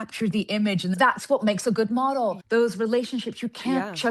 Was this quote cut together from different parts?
yes; 2 cuts; at 1.0 s, 2.4 s

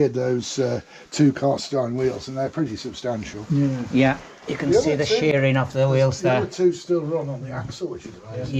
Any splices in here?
no; 0 cuts

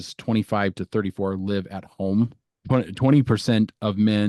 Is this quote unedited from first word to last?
no; 1 cut; at 2.5 s

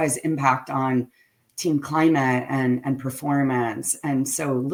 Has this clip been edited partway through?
no; 0 cuts

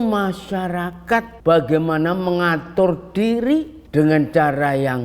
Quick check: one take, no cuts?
no; 2 cuts; at 1.3 s, 3.8 s

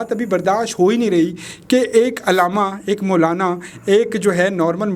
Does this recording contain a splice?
no; 0 cuts

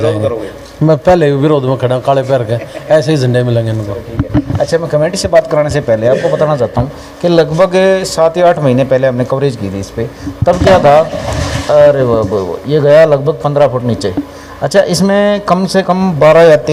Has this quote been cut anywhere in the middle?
no; 0 cuts

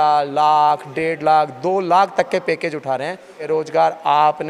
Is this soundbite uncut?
no; 1 cut; at 3.5 s

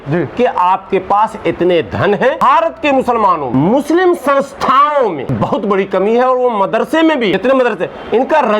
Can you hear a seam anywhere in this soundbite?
yes; 4 cuts; at 2.4 s, 3.5 s, 5.3 s, 7.4 s

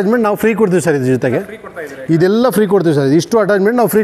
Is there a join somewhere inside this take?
no; 0 cuts

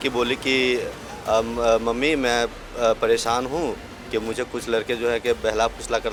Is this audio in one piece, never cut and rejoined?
yes; 0 cuts

